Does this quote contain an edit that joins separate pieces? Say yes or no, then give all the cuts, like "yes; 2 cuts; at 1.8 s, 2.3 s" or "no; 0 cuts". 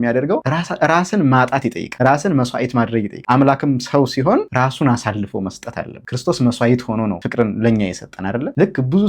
yes; 2 cuts; at 3.1 s, 7.2 s